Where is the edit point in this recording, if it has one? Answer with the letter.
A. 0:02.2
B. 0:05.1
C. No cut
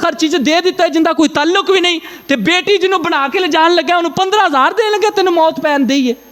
C